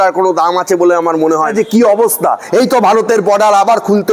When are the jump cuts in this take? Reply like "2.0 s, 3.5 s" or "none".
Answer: 1.5 s